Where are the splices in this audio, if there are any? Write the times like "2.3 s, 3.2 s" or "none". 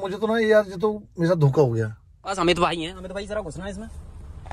2.4 s